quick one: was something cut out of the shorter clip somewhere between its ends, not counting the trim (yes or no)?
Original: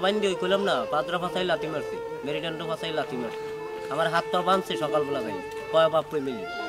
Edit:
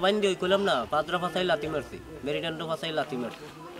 no